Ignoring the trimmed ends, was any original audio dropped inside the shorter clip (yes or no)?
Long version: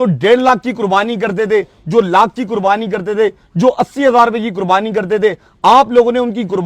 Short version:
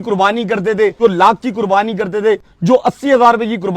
yes